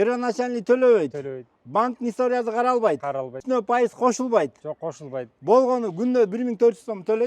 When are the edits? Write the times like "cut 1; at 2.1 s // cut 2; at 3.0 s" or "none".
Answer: cut 1; at 3.4 s